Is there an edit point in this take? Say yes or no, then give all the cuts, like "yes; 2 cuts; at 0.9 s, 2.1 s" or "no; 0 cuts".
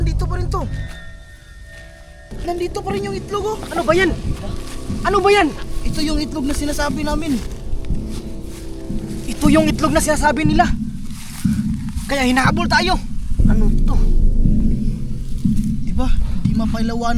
yes; 1 cut; at 2.3 s